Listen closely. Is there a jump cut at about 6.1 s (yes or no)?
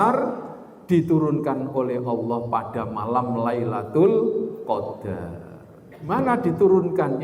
yes